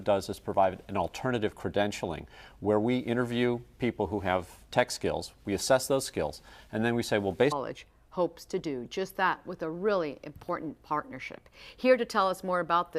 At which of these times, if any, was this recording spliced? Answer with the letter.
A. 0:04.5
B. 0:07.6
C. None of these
C